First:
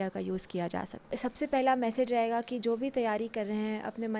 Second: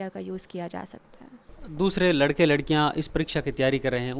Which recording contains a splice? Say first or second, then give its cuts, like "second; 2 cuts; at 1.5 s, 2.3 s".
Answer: first; 1 cut; at 1.0 s